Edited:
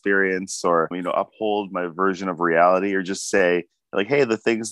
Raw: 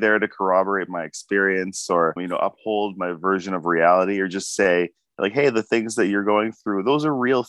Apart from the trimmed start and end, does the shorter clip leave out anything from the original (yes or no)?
no